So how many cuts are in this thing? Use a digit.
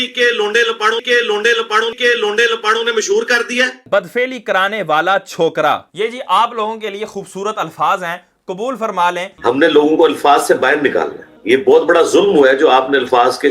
2